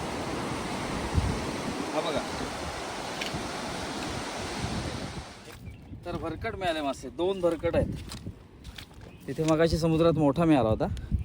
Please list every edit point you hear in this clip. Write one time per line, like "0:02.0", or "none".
0:05.2